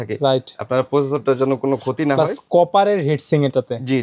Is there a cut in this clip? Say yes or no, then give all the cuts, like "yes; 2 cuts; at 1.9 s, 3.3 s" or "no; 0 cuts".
no; 0 cuts